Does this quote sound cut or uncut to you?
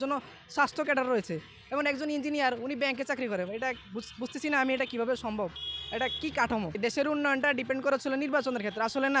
cut